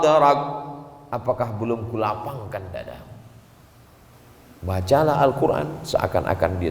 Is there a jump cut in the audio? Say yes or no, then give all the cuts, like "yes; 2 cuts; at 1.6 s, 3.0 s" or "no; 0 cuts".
yes; 1 cut; at 4.1 s